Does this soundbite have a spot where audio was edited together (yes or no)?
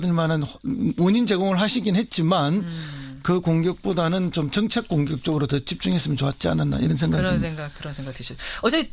yes